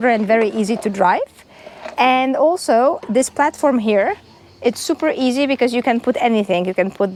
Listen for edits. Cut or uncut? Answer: uncut